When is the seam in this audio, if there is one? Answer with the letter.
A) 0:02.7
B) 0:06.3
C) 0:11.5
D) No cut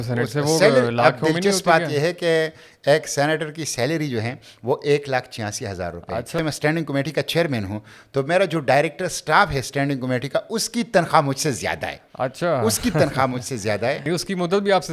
B